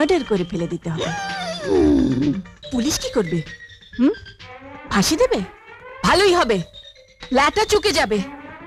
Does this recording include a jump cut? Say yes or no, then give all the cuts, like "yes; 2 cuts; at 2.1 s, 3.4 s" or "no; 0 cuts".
yes; 1 cut; at 2.5 s